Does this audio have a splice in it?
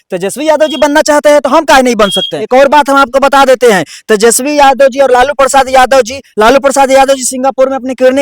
yes; 1 cut; at 2.4 s

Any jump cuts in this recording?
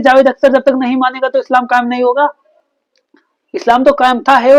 no; 0 cuts

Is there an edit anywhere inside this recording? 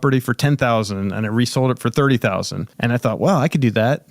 yes; 1 cut; at 2.6 s

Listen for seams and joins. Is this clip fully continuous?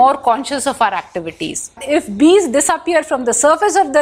no; 1 cut; at 1.8 s

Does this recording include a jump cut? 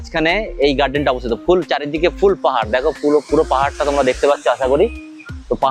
no; 0 cuts

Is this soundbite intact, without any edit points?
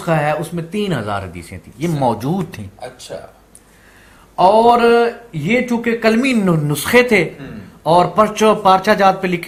yes; 0 cuts

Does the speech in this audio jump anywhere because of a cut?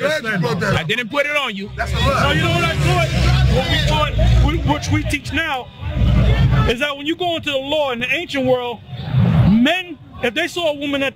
no; 0 cuts

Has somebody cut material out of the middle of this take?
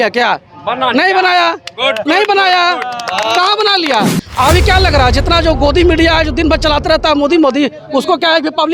yes; 1 cut; at 4.2 s

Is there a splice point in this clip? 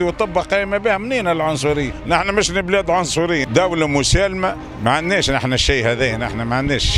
yes; 3 cuts; at 1.9 s, 3.4 s, 4.7 s

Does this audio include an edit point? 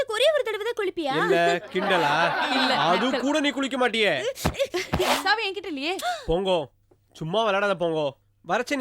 yes; 1 cut; at 5.1 s

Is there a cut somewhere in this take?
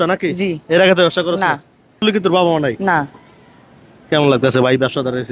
yes; 1 cut; at 2.0 s

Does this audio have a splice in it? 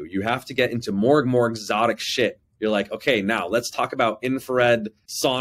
no; 0 cuts

